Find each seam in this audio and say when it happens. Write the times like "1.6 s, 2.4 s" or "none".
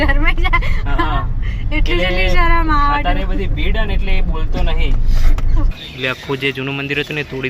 5.7 s

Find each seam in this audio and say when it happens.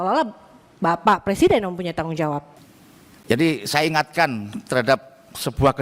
none

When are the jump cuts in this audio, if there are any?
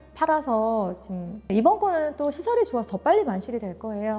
1.5 s

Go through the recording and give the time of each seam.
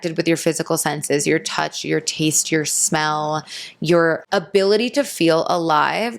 4.2 s

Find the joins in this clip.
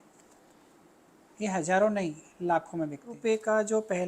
3.1 s

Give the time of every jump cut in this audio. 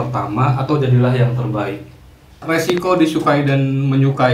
2.4 s

